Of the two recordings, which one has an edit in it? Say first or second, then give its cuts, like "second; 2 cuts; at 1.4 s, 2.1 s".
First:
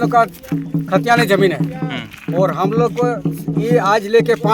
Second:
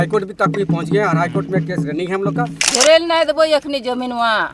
second; 1 cut; at 2.5 s